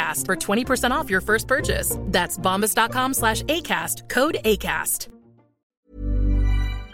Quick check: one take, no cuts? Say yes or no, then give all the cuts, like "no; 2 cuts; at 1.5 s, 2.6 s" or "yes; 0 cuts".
no; 1 cut; at 5.9 s